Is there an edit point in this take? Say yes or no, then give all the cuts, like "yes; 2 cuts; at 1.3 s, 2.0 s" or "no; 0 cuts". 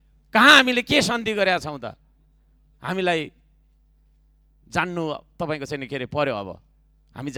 no; 0 cuts